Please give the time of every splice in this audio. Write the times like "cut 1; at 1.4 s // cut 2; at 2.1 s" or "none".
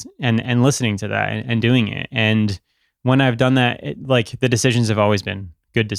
none